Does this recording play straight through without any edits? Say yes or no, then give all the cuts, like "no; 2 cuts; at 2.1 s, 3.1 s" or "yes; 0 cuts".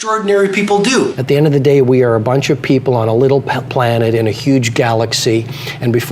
no; 1 cut; at 1.2 s